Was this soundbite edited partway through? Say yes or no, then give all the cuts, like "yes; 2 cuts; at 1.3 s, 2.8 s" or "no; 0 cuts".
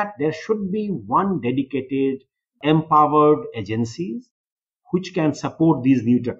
yes; 1 cut; at 2.5 s